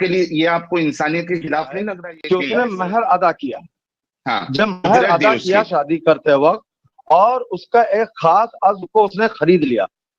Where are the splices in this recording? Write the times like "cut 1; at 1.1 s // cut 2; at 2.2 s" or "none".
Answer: cut 1; at 2.0 s